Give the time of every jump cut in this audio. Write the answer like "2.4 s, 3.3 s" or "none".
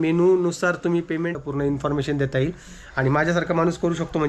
1.4 s